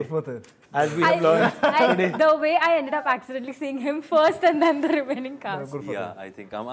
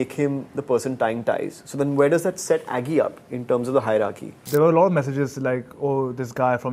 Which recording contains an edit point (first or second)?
second